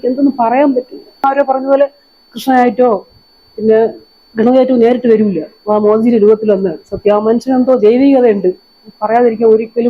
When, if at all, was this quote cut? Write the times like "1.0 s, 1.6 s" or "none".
1.2 s